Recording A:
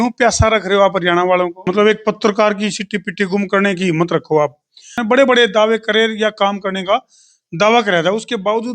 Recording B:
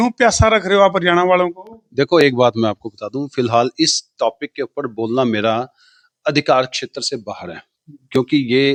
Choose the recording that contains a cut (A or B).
A